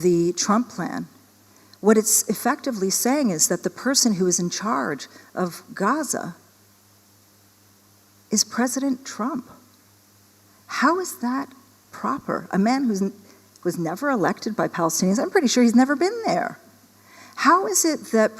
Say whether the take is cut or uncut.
uncut